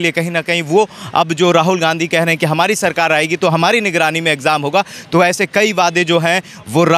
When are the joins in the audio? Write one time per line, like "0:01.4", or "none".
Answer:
none